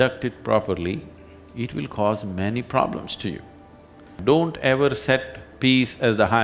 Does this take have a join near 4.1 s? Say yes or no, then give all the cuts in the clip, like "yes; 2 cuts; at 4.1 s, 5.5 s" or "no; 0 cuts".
yes; 1 cut; at 4.1 s